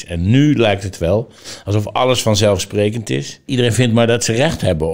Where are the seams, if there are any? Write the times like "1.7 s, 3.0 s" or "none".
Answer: 3.4 s